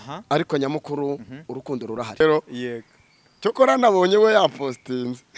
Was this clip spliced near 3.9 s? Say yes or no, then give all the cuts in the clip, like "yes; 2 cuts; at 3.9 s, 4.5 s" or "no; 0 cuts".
no; 1 cut; at 2.2 s